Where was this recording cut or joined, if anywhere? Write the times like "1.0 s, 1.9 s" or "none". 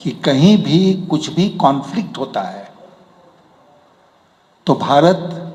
none